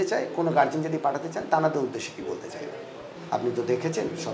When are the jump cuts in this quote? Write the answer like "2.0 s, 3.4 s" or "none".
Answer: 3.1 s